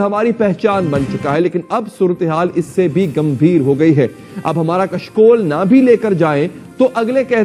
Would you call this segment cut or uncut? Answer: uncut